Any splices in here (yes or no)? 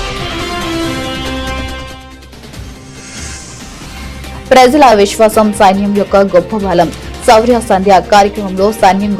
no